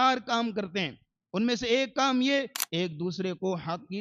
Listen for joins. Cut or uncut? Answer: cut